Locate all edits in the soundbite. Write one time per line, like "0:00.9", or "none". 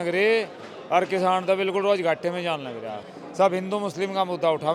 0:03.2